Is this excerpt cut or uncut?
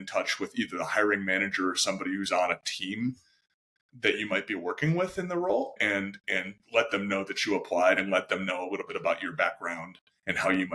cut